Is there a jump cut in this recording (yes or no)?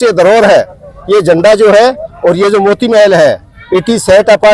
no